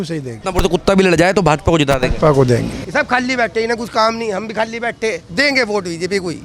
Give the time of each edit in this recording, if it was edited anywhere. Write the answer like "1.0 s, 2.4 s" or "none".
2.8 s